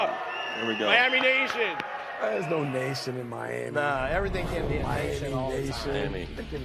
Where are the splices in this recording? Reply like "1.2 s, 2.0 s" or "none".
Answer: none